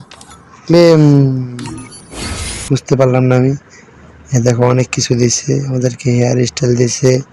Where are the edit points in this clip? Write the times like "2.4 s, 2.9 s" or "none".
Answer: 2.7 s

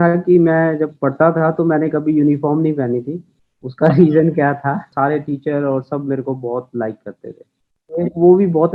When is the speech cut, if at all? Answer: 4.9 s, 7.8 s

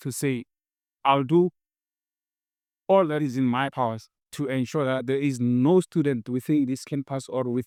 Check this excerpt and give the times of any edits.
none

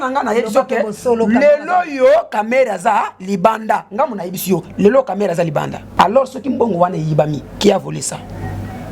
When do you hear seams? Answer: 5.8 s

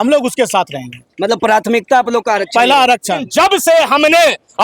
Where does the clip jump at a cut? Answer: 3.2 s

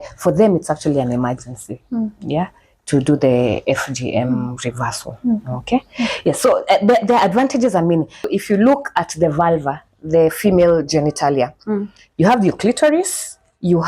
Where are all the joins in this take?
8.3 s

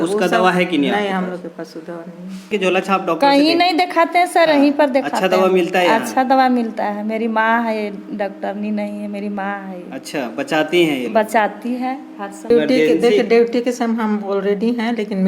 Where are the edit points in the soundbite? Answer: 2.5 s, 12.5 s

